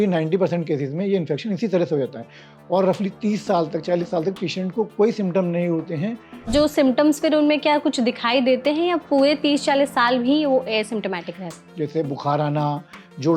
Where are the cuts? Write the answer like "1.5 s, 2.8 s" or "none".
6.5 s, 11.6 s